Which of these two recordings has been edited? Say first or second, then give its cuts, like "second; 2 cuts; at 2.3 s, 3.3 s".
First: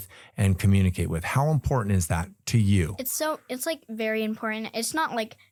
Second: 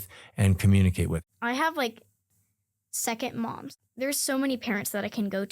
second; 2 cuts; at 1.2 s, 3.7 s